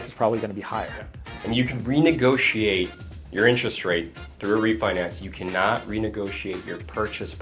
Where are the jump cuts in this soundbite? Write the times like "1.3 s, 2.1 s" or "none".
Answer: 1.3 s